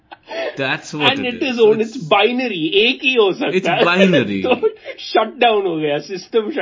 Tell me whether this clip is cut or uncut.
uncut